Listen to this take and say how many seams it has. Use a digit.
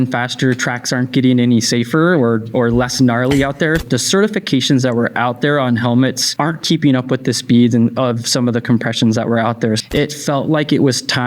3